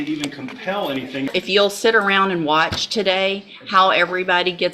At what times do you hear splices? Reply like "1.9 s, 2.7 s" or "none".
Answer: 1.3 s